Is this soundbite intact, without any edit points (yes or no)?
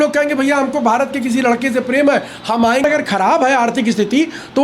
no